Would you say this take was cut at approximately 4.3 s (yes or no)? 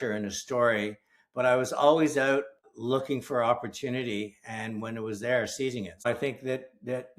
no